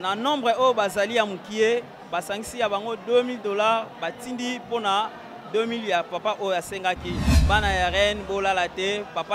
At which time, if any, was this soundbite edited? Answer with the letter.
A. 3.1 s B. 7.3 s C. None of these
B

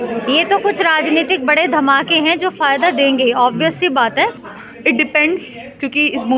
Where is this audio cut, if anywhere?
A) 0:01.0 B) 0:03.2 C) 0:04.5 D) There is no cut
C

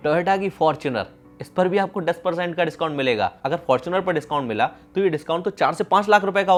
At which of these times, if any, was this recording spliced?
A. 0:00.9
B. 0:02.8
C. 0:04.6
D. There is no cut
D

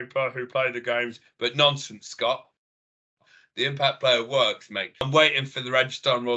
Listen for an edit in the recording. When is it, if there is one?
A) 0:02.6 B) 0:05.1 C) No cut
B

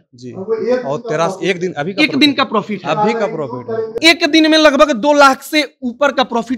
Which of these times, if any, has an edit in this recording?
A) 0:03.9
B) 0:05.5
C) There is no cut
A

